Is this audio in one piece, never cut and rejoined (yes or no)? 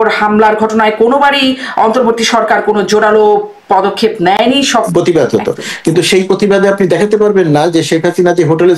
no